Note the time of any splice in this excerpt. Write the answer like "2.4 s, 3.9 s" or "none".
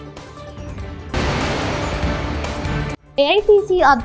1.1 s